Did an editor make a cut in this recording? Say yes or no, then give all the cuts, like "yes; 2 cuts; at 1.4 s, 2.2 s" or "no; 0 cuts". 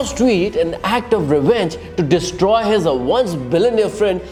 no; 0 cuts